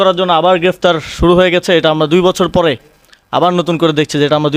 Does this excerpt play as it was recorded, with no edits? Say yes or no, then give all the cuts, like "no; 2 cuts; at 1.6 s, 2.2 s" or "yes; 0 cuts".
yes; 0 cuts